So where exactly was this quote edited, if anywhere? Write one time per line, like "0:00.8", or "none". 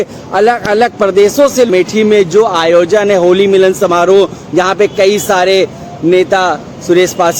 0:01.7